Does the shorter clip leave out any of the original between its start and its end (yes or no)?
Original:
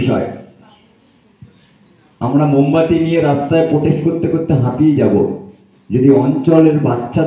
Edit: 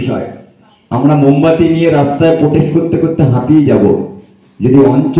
yes